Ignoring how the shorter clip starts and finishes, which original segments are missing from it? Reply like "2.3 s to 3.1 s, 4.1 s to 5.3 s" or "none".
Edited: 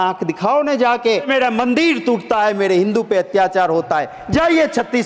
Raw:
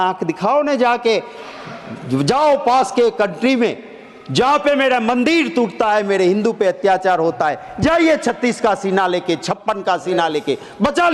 1.3 s to 4.8 s